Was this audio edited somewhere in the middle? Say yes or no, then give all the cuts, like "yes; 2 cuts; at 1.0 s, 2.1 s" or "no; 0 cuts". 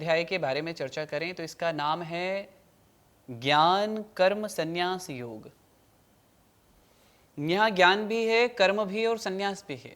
no; 0 cuts